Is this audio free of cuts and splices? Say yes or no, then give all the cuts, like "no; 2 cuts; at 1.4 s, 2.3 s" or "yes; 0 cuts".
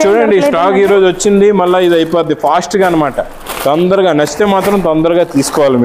yes; 0 cuts